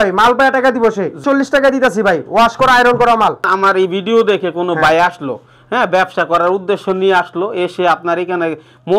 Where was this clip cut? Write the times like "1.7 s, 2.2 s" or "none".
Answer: 1.2 s, 3.5 s